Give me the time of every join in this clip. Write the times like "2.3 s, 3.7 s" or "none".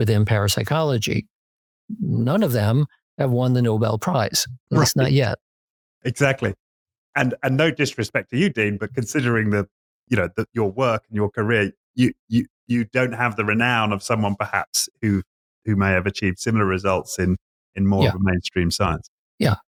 none